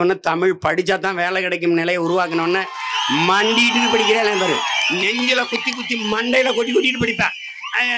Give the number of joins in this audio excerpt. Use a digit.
0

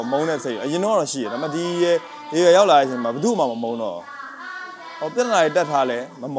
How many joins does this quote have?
0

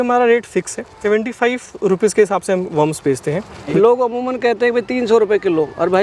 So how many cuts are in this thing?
2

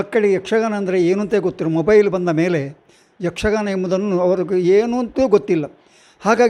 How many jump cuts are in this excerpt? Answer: 0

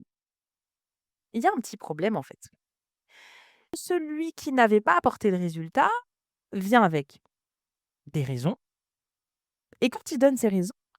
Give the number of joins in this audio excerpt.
1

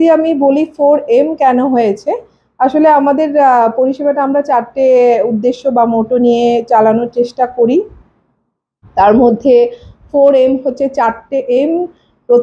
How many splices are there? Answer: 0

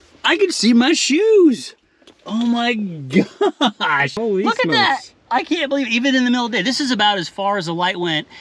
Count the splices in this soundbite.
1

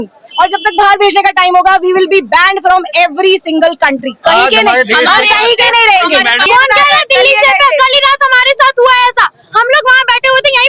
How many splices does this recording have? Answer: 1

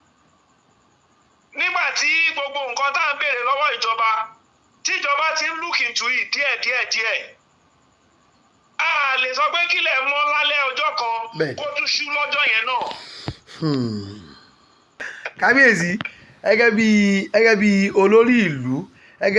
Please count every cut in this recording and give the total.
1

